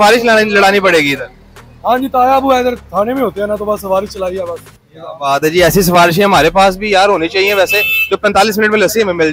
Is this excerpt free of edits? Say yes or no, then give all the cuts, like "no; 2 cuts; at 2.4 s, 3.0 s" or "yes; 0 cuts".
yes; 0 cuts